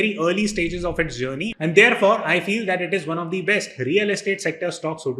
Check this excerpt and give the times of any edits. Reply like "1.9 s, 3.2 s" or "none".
none